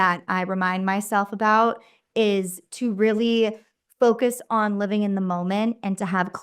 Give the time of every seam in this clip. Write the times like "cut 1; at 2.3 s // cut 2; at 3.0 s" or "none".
none